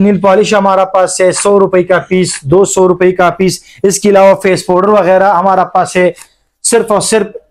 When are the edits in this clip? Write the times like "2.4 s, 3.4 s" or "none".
none